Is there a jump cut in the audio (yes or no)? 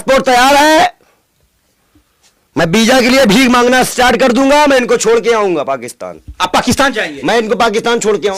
no